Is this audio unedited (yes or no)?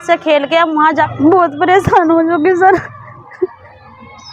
no